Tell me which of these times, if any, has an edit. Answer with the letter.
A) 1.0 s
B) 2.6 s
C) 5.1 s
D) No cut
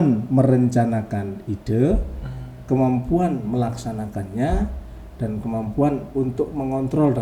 D